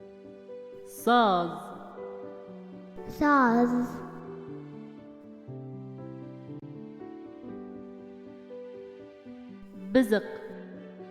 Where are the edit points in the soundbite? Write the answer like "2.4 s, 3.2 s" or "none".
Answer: 1.0 s, 1.8 s, 3.2 s, 3.9 s, 5.5 s, 6.6 s, 9.7 s